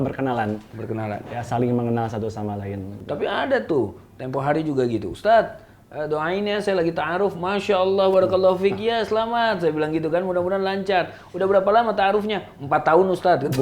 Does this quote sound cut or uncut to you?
cut